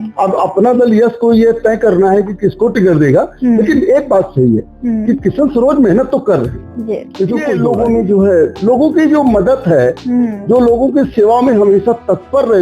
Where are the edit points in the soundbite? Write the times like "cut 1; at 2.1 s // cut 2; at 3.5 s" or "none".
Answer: cut 1; at 7.6 s